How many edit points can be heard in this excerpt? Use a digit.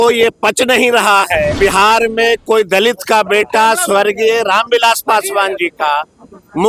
1